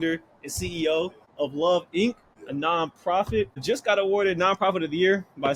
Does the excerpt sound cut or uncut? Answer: uncut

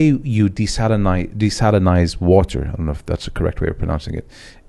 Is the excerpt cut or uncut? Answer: uncut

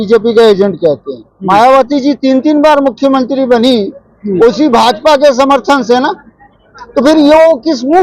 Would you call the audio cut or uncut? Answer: uncut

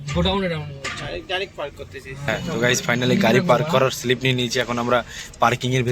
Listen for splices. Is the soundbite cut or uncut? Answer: cut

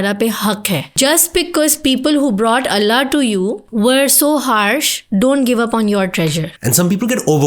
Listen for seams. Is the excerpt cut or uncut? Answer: cut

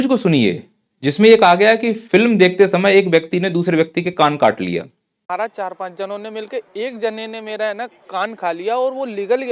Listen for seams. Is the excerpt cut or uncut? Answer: uncut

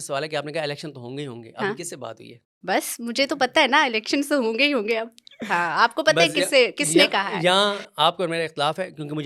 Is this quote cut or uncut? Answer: uncut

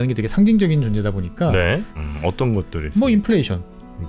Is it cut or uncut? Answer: cut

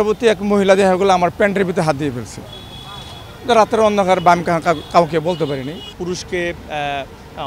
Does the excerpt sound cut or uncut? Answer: cut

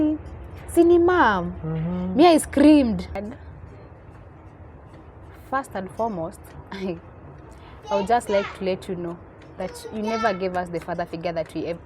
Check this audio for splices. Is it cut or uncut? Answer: cut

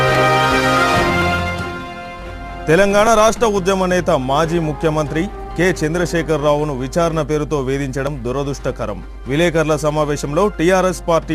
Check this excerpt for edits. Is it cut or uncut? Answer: cut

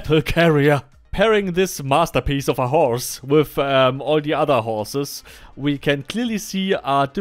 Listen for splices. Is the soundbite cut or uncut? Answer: cut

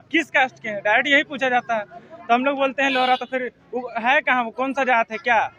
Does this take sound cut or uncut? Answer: uncut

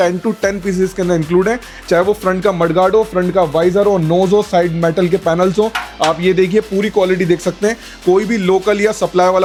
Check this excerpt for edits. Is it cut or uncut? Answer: uncut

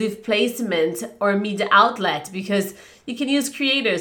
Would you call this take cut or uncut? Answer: uncut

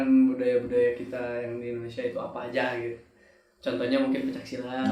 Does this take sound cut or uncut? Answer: uncut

